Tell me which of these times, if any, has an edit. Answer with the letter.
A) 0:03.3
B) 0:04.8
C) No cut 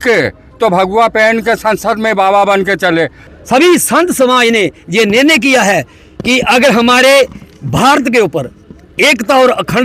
A